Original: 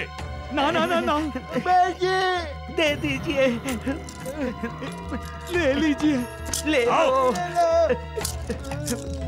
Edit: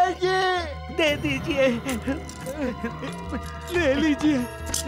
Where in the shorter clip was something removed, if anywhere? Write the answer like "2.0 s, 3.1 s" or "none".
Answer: none